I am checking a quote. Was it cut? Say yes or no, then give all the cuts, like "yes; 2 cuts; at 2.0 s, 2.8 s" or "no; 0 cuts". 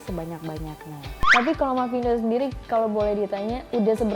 yes; 1 cut; at 1.1 s